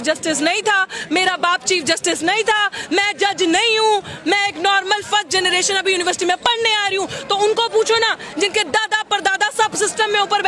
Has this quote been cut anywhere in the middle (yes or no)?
no